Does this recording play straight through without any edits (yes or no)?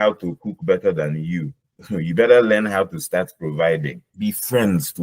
no